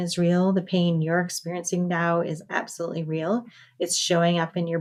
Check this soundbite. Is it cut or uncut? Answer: uncut